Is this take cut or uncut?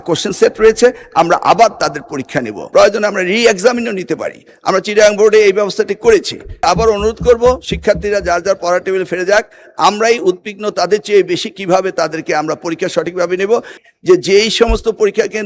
cut